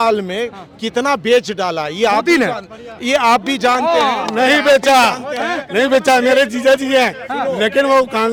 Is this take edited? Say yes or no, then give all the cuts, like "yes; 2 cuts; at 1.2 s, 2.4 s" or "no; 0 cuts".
no; 0 cuts